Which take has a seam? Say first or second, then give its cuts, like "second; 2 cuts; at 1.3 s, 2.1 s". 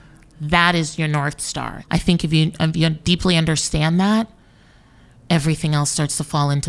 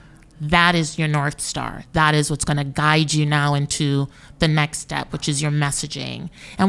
first; 1 cut; at 1.7 s